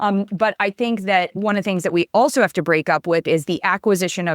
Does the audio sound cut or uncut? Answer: cut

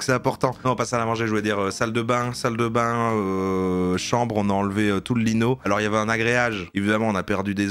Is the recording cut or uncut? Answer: cut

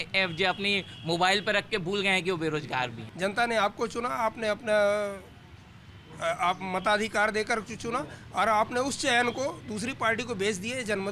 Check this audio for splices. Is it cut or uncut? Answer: cut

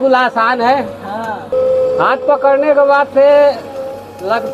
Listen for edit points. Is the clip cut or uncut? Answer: cut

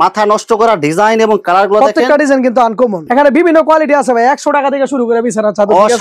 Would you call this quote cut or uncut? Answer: cut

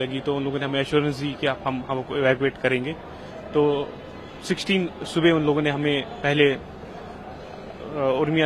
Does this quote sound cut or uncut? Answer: uncut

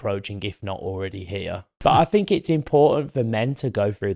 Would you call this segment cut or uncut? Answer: cut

